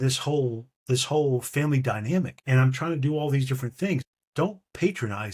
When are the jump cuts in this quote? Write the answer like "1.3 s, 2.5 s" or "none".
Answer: 2.4 s, 4.2 s